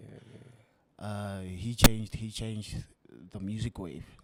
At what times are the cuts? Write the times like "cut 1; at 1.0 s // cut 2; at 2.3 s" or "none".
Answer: none